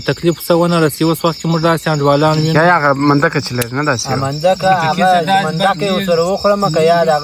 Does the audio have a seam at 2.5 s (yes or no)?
yes